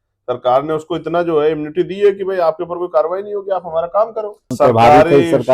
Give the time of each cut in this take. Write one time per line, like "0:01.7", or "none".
0:04.5

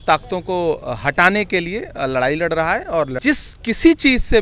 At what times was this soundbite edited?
0:03.1

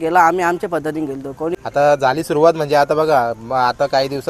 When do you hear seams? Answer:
0:01.6

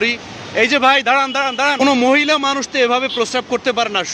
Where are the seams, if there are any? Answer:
0:01.8

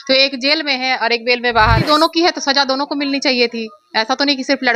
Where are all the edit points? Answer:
0:01.8

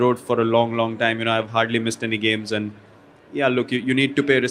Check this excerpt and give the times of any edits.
none

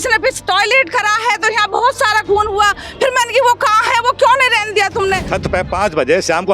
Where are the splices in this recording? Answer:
0:05.3

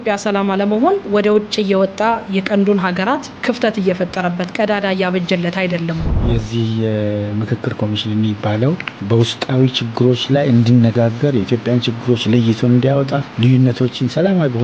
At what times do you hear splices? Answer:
0:03.4
0:06.1
0:08.9
0:13.2

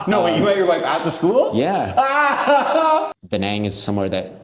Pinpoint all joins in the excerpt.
0:03.1

